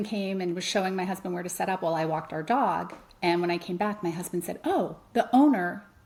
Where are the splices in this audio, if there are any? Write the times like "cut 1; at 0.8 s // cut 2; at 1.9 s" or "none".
none